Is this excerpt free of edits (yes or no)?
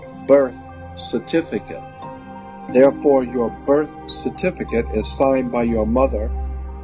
no